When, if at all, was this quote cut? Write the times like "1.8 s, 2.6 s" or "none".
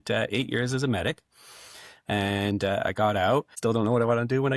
3.5 s